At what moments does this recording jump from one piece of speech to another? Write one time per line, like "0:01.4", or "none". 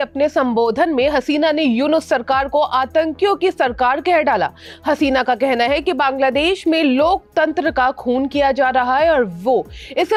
none